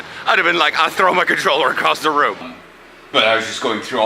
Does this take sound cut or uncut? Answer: cut